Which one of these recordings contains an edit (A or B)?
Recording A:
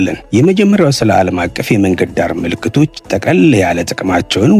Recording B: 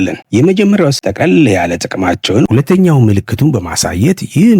B